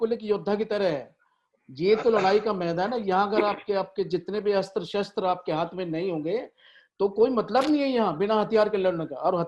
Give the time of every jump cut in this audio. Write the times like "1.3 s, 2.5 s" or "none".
none